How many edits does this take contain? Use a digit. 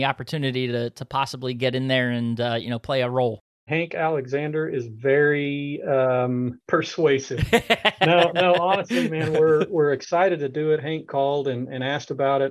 2